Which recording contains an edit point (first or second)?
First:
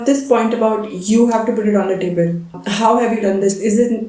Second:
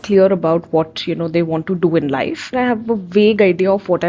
second